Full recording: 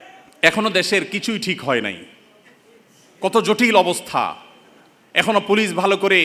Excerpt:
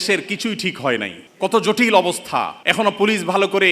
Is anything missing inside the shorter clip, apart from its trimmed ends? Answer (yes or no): yes